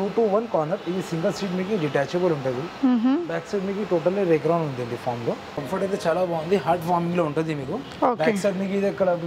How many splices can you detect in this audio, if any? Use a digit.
2